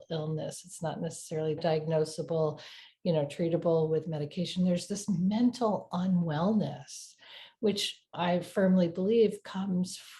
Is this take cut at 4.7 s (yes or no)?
no